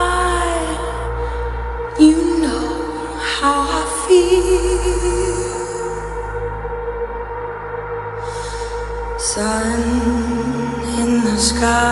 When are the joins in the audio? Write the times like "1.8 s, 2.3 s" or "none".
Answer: 1.9 s